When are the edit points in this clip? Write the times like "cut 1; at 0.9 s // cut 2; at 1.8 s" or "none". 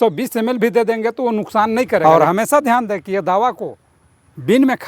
cut 1; at 2.0 s

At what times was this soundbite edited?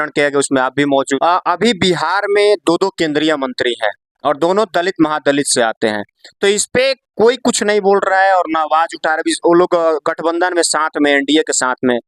cut 1; at 1.1 s

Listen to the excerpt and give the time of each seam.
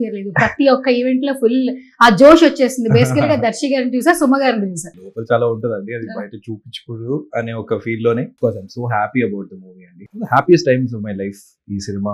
cut 1; at 5.1 s // cut 2; at 8.3 s // cut 3; at 10.0 s

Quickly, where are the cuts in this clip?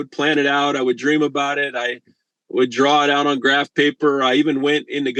none

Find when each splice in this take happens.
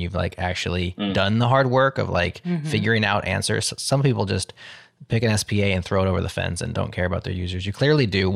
none

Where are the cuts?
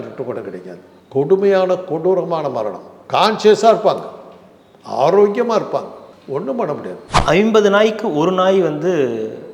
cut 1; at 7.1 s

